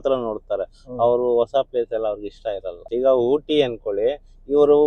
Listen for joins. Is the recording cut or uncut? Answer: cut